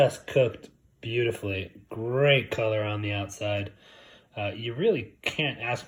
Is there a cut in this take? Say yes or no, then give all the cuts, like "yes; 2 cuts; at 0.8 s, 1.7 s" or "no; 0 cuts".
no; 0 cuts